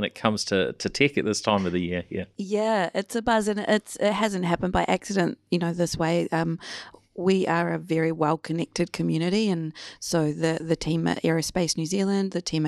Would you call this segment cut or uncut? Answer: uncut